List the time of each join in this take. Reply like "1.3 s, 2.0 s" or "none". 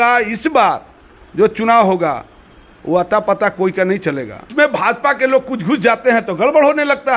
4.5 s